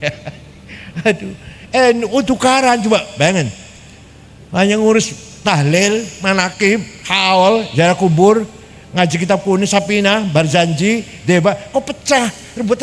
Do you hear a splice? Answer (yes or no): no